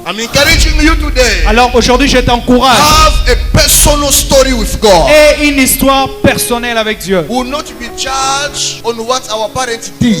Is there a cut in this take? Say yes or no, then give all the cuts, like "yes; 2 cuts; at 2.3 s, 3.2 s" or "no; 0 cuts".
yes; 2 cuts; at 7.3 s, 8.7 s